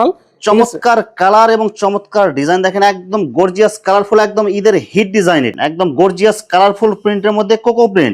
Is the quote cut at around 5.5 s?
yes; 1 cut; at 5.5 s

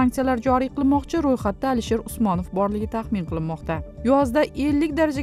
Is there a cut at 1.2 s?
no; 1 cut; at 3.9 s

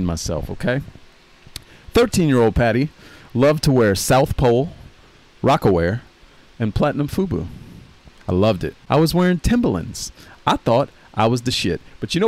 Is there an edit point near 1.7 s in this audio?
no; 1 cut; at 8.8 s

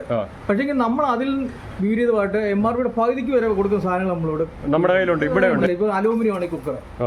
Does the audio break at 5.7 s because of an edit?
yes; 1 cut; at 5.7 s

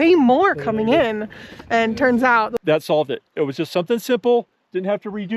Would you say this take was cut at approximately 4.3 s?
no; 1 cut; at 2.6 s

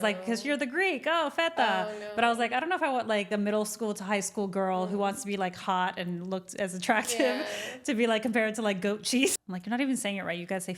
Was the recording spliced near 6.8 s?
no; 2 cuts; at 3.3 s, 9.4 s

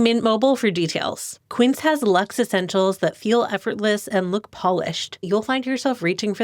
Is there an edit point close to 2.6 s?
no; 2 cuts; at 1.4 s, 5.3 s

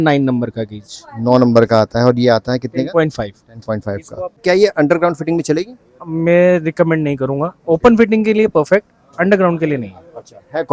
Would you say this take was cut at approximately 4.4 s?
yes; 1 cut; at 4.4 s

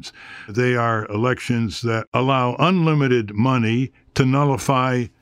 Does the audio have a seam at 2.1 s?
yes; 1 cut; at 2.1 s

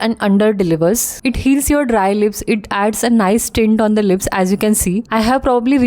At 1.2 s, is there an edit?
yes; 2 cuts; at 1.2 s, 5.1 s

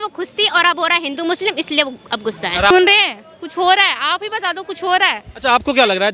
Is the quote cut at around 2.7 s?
yes; 1 cut; at 2.7 s

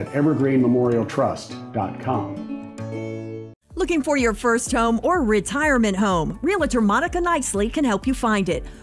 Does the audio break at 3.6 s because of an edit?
yes; 1 cut; at 3.6 s

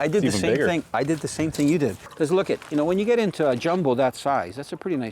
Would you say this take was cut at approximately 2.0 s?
yes; 1 cut; at 2.0 s

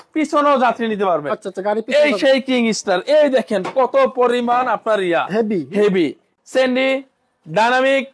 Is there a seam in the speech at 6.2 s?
yes; 1 cut; at 6.2 s

